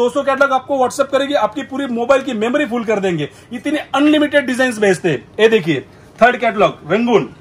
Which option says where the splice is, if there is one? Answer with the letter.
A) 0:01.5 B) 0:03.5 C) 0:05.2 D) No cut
D